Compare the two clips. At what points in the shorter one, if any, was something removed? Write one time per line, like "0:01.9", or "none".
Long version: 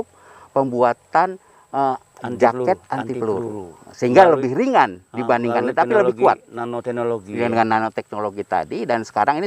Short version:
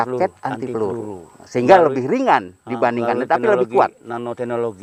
none